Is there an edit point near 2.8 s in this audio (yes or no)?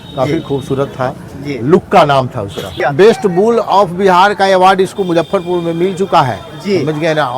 yes